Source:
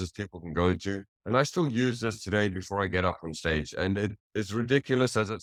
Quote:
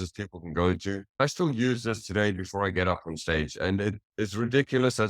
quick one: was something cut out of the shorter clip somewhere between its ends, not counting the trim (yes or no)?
yes